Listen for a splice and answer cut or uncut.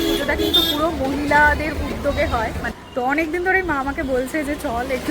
cut